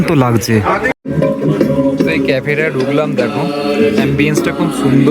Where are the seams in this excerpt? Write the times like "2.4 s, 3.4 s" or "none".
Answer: 0.9 s